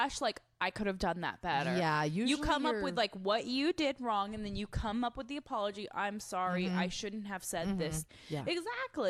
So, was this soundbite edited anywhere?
yes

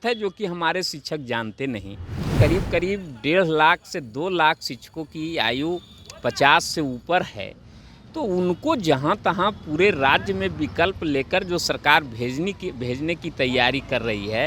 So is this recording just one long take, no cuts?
no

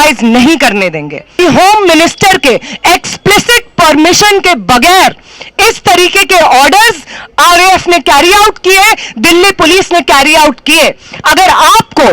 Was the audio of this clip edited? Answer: yes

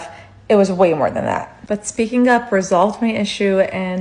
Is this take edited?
no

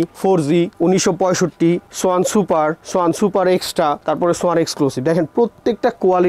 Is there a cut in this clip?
no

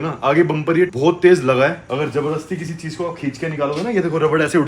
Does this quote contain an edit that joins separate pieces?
yes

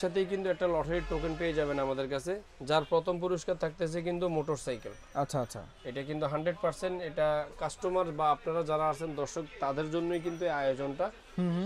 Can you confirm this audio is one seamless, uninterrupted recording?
yes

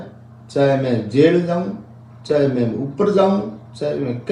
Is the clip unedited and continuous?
yes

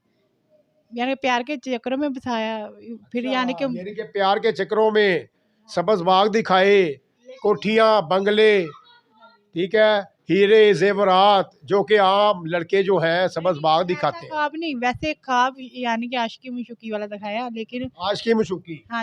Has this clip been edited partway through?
no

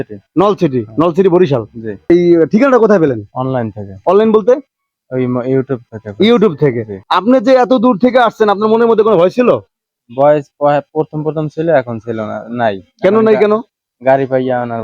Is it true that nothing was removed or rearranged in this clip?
no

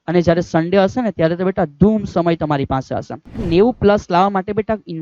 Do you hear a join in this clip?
yes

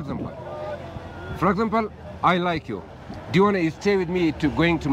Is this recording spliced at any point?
no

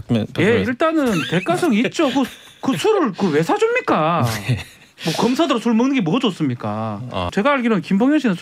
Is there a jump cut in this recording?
yes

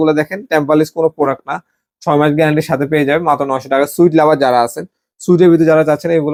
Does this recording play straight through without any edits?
yes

